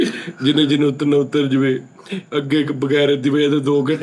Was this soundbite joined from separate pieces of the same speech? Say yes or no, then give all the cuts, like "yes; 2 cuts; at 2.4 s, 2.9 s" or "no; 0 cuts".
no; 0 cuts